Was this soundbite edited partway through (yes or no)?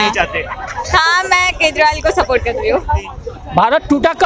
yes